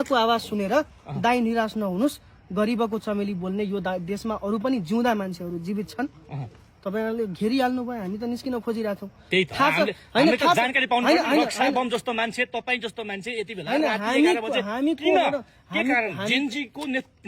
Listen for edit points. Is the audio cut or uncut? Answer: uncut